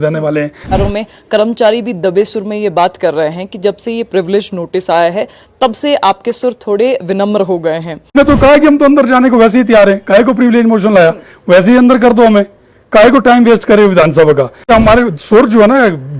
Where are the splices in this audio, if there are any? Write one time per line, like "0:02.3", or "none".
0:00.7
0:08.2
0:14.7